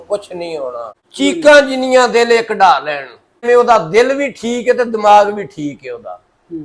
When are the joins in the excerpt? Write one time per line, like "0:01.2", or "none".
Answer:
0:01.0
0:03.4